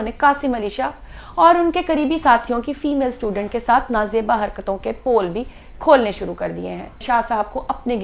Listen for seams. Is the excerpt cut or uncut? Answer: cut